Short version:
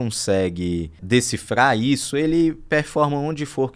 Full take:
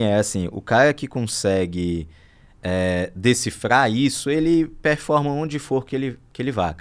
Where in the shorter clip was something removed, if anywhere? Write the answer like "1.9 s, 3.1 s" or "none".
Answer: 1.0 s